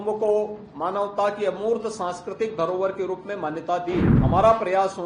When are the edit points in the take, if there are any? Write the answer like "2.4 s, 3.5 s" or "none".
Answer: 4.1 s